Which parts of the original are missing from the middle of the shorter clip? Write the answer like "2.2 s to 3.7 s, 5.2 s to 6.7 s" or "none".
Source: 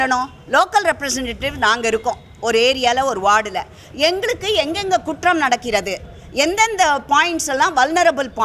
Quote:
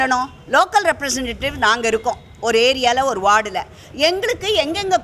none